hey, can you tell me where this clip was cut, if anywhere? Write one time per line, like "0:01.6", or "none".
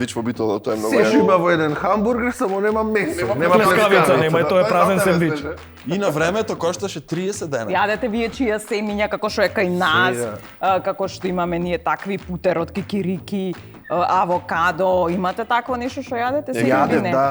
0:07.7